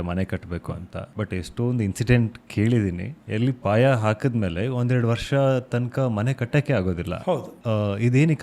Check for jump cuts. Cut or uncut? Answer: cut